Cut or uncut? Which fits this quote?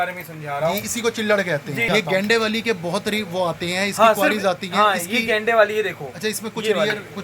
cut